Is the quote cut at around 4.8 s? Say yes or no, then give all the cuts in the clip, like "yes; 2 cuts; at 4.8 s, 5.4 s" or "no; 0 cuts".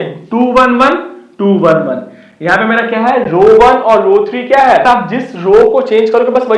yes; 1 cut; at 4.8 s